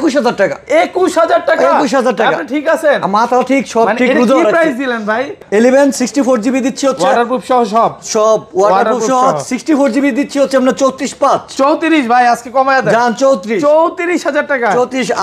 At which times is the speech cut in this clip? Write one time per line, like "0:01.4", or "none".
0:05.3